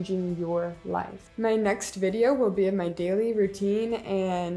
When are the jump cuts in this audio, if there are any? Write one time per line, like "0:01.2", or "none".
none